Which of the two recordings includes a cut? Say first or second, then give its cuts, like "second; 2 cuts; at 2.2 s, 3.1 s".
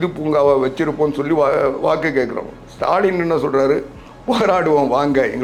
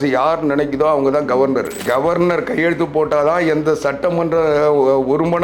second; 1 cut; at 1.8 s